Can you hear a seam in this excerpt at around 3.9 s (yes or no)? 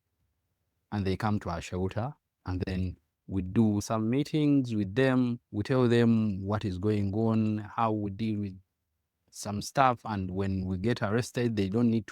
yes